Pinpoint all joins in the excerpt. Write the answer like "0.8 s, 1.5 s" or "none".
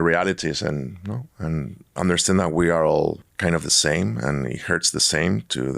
3.3 s